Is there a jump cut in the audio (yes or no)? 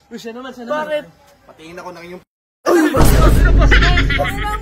no